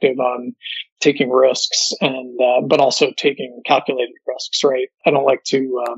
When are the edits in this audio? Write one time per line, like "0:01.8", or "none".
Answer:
0:05.0